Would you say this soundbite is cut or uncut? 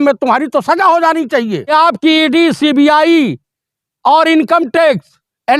cut